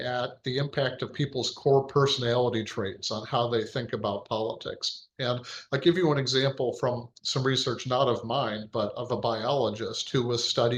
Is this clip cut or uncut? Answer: uncut